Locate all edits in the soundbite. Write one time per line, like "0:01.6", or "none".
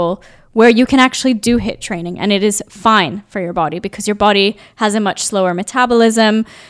none